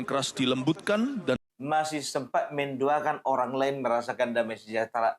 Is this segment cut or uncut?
cut